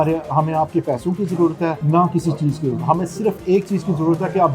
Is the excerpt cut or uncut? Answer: cut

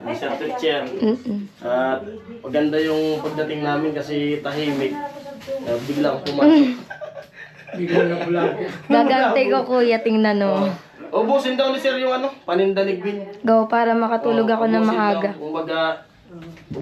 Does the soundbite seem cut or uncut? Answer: uncut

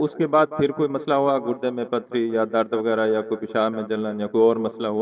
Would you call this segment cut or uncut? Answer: uncut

